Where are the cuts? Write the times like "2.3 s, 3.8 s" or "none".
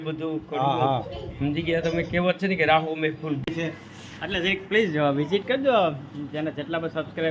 3.5 s